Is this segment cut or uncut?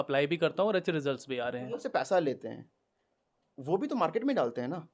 cut